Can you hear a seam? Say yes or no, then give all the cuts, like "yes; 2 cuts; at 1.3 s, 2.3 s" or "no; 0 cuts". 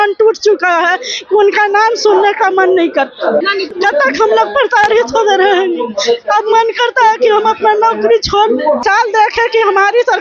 yes; 2 cuts; at 3.6 s, 8.8 s